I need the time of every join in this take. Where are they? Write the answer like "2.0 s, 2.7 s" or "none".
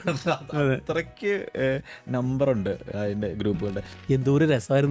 3.9 s